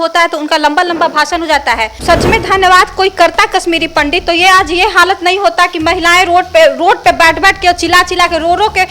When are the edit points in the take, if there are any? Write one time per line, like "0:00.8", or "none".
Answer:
0:02.0